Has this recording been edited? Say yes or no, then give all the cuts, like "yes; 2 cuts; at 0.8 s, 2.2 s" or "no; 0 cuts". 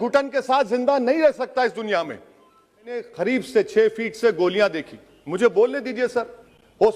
yes; 1 cut; at 3.0 s